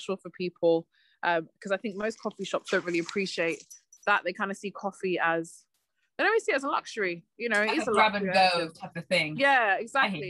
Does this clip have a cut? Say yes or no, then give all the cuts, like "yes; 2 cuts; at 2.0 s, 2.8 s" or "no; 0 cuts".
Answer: no; 0 cuts